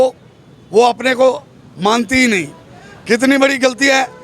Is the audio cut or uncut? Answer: uncut